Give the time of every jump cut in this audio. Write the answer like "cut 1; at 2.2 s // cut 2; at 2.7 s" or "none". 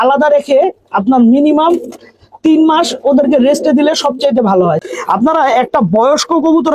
cut 1; at 4.8 s